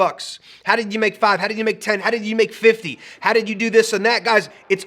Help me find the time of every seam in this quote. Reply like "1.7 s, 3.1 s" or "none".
2.0 s